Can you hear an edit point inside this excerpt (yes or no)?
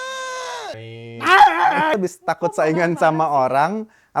yes